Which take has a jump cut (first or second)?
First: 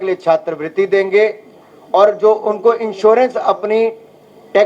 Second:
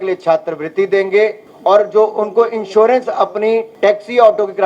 second